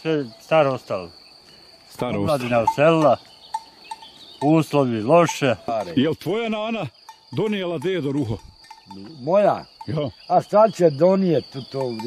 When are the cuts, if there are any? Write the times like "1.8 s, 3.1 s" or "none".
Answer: 5.6 s